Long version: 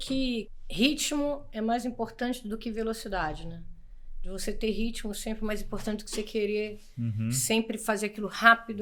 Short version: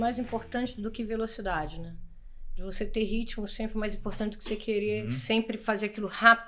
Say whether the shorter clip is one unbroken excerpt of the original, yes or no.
no